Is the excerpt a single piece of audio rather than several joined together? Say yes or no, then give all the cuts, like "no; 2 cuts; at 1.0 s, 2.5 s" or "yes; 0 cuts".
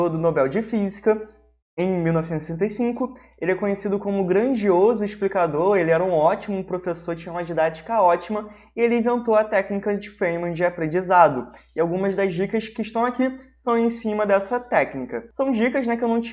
no; 1 cut; at 15.2 s